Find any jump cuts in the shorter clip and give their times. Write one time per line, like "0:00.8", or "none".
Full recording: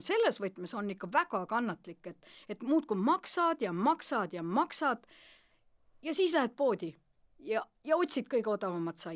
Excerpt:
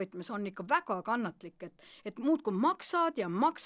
none